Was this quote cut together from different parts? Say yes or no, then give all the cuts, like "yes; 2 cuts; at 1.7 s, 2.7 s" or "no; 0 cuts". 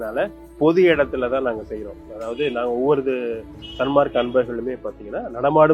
no; 0 cuts